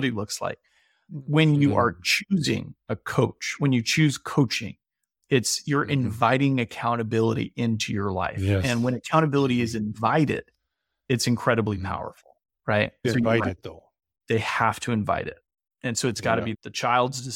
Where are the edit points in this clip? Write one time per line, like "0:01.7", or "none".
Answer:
none